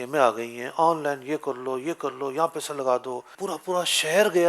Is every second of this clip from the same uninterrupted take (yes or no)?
no